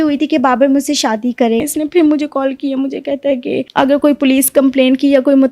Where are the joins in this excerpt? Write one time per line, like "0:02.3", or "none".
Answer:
0:01.6
0:03.7

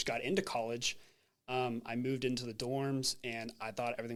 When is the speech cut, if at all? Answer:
none

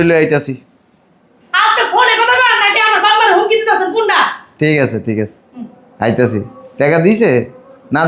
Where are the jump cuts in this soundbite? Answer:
none

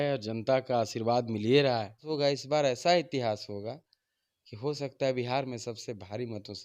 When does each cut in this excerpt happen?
0:02.1

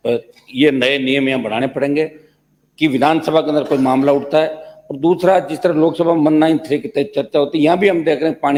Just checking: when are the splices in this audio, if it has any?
none

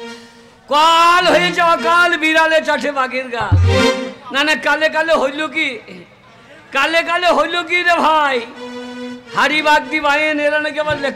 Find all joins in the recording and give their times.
none

